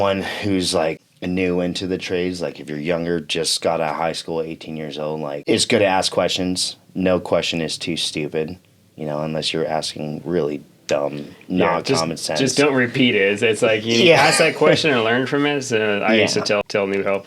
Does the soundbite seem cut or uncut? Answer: cut